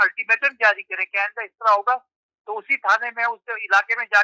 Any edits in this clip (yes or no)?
no